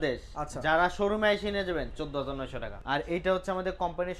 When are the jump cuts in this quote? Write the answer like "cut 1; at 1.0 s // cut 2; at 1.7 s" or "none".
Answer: cut 1; at 2.7 s

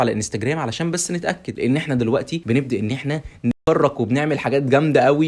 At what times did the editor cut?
cut 1; at 1.5 s // cut 2; at 2.4 s

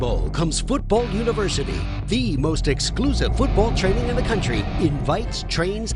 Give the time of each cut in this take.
none

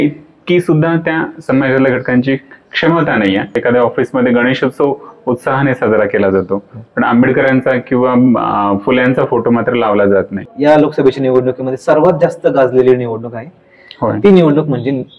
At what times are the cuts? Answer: cut 1; at 3.6 s // cut 2; at 10.5 s

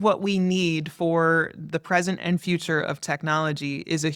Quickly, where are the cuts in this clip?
none

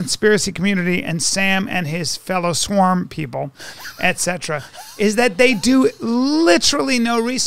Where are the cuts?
none

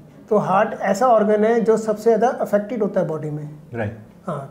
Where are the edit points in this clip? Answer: none

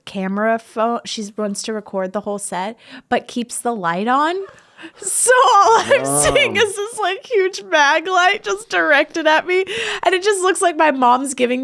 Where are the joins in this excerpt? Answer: none

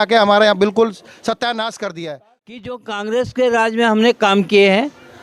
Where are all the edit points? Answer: cut 1; at 2.6 s

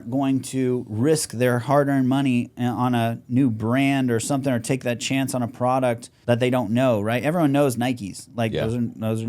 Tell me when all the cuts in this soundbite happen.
cut 1; at 6.1 s

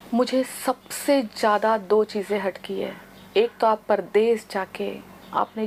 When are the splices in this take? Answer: none

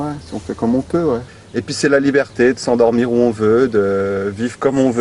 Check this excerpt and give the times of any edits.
cut 1; at 1.3 s

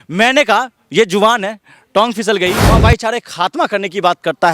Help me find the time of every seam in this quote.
cut 1; at 2.6 s

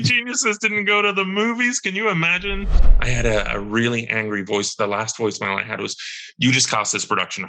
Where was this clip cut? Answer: cut 1; at 2.7 s

